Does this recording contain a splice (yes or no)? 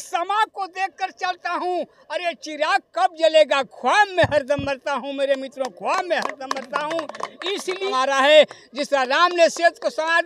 yes